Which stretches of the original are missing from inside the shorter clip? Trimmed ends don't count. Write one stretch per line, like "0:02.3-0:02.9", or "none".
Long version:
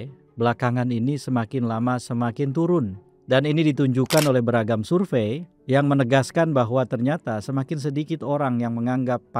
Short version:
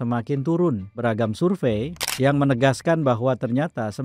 0:03.1-0:04.5